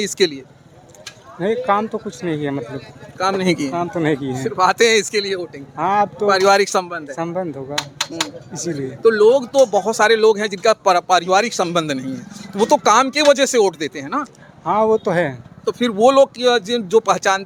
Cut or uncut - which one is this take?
uncut